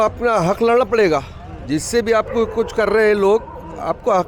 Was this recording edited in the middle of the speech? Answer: no; 0 cuts

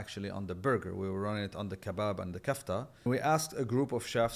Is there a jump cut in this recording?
yes; 1 cut; at 3.1 s

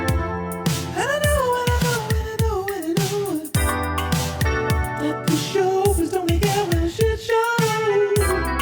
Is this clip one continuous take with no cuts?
yes; 0 cuts

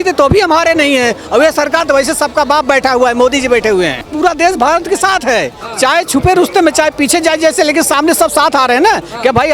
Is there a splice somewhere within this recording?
yes; 1 cut; at 4.1 s

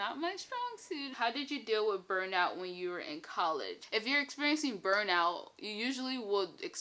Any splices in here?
yes; 2 cuts; at 1.1 s, 3.8 s

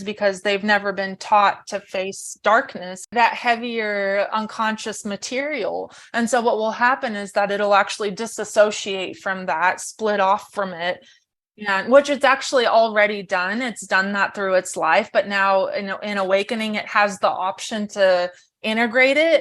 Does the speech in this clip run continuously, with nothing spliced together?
no; 1 cut; at 3.1 s

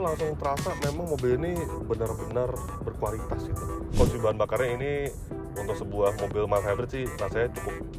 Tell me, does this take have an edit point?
yes; 1 cut; at 3.8 s

